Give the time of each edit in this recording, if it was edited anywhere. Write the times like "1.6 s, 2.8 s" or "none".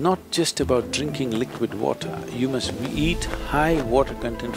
none